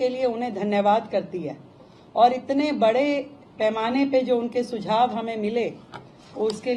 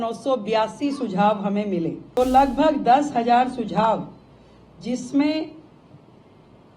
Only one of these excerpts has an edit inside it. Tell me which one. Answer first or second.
second